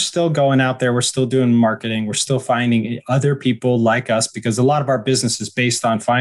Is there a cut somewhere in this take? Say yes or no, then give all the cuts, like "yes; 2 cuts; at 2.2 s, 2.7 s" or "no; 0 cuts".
no; 0 cuts